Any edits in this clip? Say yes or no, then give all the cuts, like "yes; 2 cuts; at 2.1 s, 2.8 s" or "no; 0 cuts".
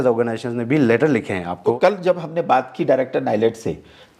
yes; 1 cut; at 1.8 s